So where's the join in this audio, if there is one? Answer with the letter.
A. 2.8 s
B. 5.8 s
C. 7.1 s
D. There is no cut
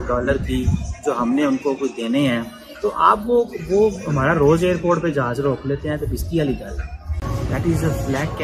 D